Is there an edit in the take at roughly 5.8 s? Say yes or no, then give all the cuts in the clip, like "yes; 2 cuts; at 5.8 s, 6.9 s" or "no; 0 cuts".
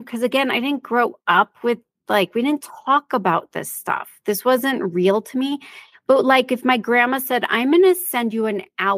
no; 0 cuts